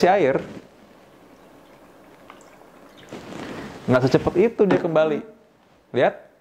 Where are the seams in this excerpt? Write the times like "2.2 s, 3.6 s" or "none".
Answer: none